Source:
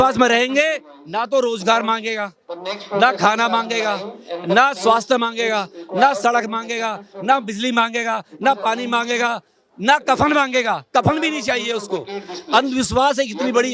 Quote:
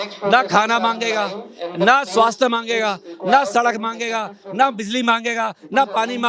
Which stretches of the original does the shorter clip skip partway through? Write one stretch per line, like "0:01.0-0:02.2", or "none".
none